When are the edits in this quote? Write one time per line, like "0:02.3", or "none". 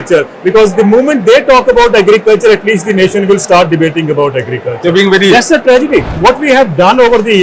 0:06.1